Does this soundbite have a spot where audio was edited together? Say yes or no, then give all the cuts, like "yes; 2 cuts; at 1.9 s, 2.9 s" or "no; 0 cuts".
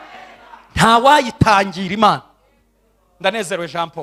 no; 0 cuts